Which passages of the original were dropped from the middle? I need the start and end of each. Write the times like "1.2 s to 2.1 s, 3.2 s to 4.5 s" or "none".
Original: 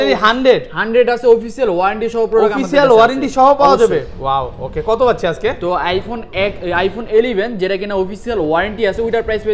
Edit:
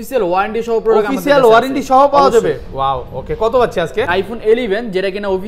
5.5 s to 6.7 s